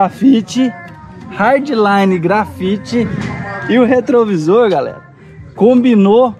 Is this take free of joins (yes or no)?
yes